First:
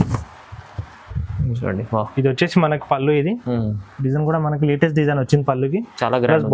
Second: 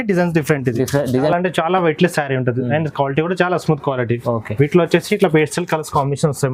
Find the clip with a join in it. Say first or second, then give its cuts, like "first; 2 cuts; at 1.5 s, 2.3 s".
second; 1 cut; at 1.3 s